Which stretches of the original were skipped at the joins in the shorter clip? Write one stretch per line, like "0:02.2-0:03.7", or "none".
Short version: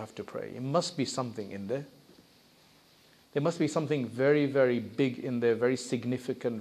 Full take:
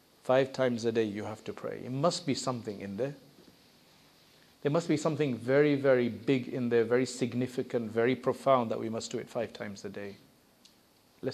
none